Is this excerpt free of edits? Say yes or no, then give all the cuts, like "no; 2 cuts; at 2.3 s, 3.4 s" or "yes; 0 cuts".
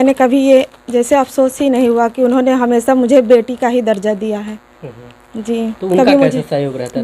yes; 0 cuts